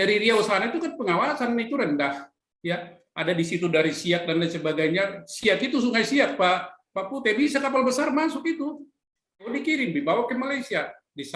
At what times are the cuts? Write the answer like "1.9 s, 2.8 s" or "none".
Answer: 9.5 s

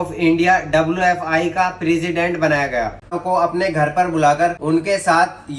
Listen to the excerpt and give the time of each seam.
3.2 s, 4.6 s

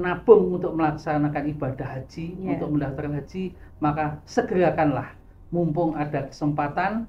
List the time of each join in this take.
none

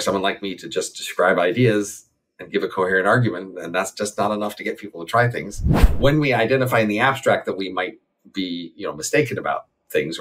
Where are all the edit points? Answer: 5.9 s

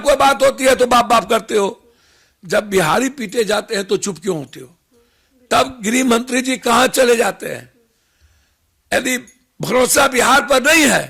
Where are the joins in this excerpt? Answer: none

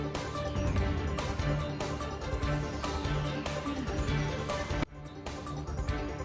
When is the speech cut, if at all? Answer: none

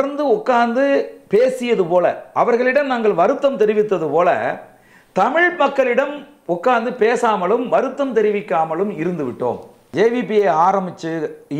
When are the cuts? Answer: 9.9 s

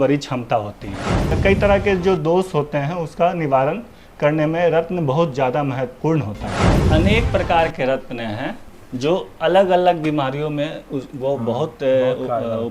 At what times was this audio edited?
1.4 s, 6.8 s

